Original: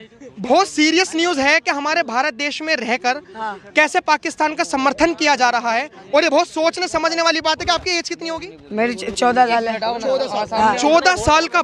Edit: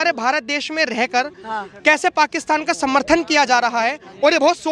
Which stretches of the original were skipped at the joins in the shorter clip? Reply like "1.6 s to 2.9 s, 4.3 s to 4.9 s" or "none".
none

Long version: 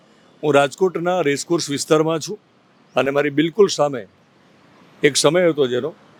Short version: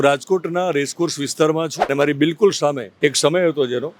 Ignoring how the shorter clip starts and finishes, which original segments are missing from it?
2.4 s to 3.1 s, 4.0 s to 4.9 s

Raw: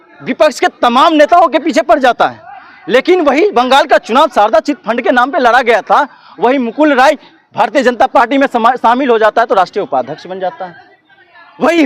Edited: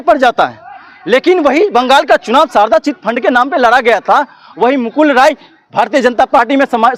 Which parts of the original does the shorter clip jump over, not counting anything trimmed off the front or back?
none

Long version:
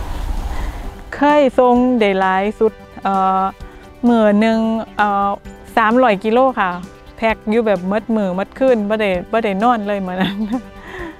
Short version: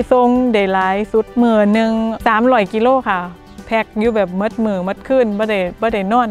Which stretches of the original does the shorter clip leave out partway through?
2.8 s to 4.0 s, 4.8 s to 5.7 s

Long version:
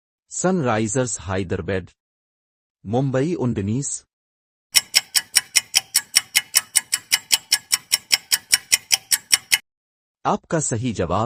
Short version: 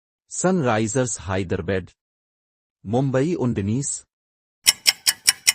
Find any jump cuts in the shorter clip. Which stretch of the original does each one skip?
4.6 s to 7.8 s

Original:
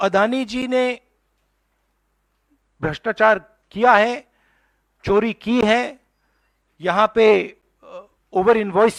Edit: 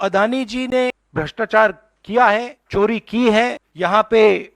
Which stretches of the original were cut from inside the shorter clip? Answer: 1.0 s to 2.7 s, 4.2 s to 4.9 s, 6.0 s to 6.7 s

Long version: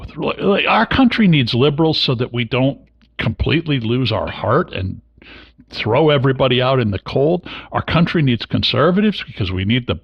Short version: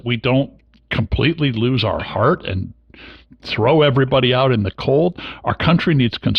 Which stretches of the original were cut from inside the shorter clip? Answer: none

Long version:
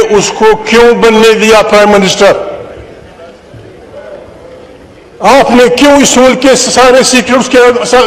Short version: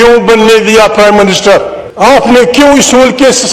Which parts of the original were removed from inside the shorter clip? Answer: 2.5 s to 5.0 s

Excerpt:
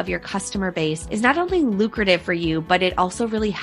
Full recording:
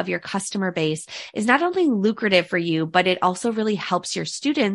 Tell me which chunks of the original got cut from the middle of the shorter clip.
1.0 s to 1.3 s

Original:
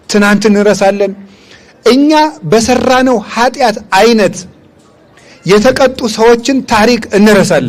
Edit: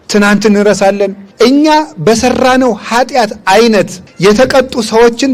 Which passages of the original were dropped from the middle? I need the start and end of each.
1.2 s to 1.7 s, 4.5 s to 5.3 s

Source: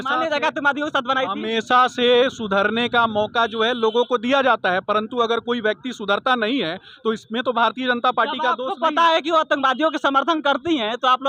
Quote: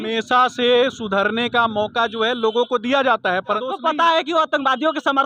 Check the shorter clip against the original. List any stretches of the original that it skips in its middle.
5.0 s to 8.6 s

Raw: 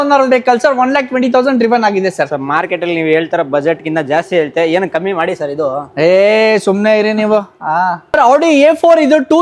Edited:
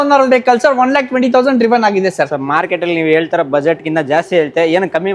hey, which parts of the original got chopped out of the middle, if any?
none

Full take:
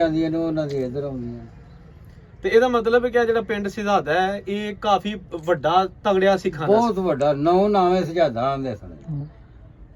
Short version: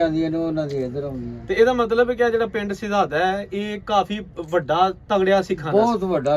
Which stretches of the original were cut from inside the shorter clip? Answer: 1.3 s to 2.2 s

